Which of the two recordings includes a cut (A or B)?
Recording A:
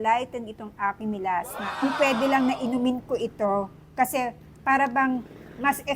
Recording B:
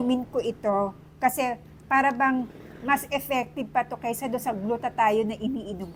A